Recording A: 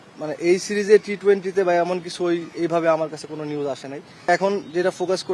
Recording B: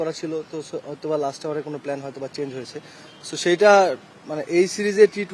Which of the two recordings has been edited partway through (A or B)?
A